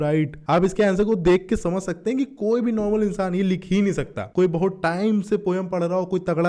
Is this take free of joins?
yes; 0 cuts

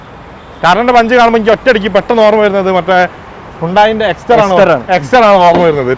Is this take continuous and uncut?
yes; 0 cuts

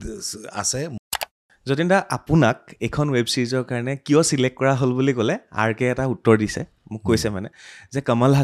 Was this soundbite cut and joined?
yes; 1 cut; at 1.0 s

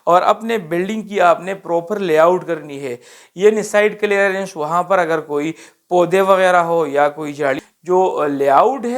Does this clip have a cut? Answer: yes; 1 cut; at 7.6 s

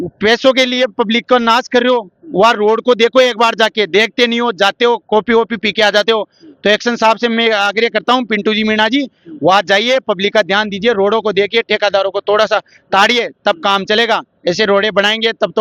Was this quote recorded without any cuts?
yes; 0 cuts

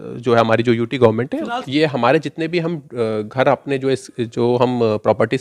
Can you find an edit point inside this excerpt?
yes; 1 cut; at 1.6 s

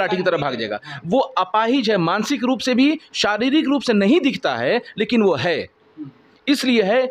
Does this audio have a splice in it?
no; 0 cuts

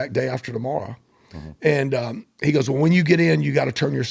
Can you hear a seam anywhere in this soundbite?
no; 0 cuts

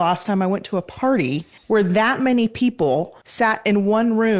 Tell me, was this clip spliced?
yes; 2 cuts; at 1.5 s, 3.2 s

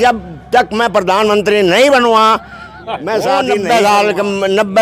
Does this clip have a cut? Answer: yes; 1 cut; at 3.6 s

